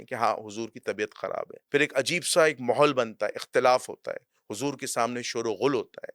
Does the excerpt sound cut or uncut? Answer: cut